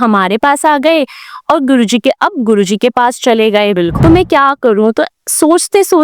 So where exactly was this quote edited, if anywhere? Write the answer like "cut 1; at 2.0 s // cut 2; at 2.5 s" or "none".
cut 1; at 3.9 s